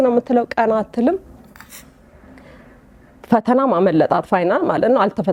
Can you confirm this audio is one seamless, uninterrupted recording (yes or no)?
yes